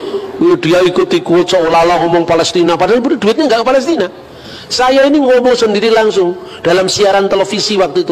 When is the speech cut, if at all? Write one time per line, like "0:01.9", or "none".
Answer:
none

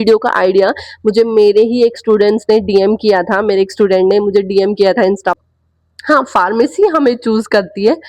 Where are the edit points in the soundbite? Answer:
0:05.4

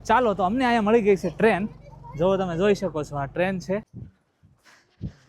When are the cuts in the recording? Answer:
0:03.9

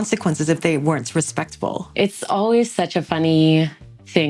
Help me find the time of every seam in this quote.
0:01.8

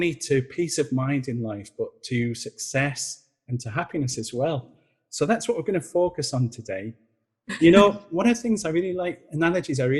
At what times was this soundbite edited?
0:07.5

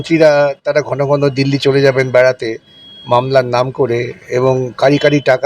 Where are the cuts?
none

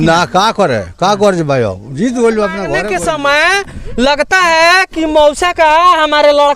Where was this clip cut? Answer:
0:02.8

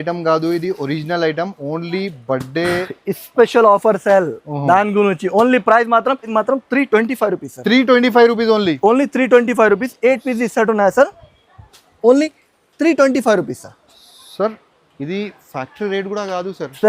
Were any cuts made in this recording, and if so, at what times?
0:06.3

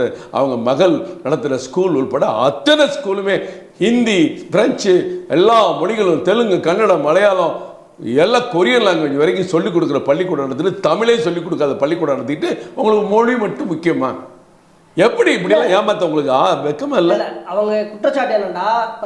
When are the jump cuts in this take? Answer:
none

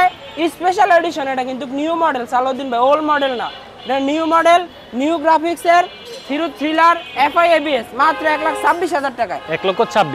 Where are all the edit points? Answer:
none

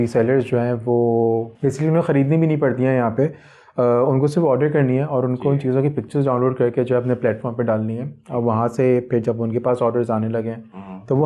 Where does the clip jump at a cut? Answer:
0:01.5

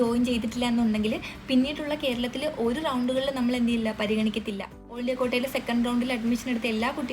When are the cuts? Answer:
0:04.8

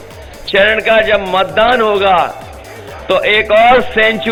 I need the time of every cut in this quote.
none

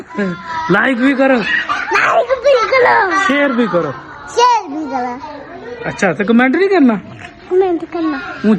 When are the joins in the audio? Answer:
none

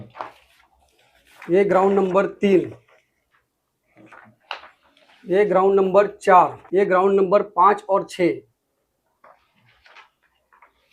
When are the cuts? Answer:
0:06.6

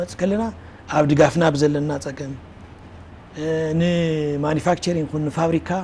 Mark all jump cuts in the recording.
none

